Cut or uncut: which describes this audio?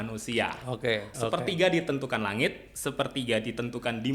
cut